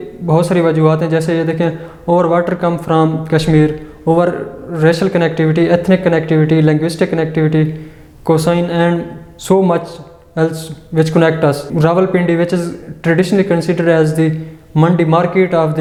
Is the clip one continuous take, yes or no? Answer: yes